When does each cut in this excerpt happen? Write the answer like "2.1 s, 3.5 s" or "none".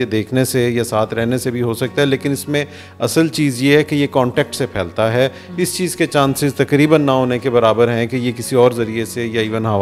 none